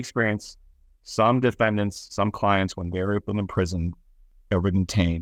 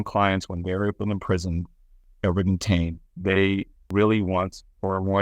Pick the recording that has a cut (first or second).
second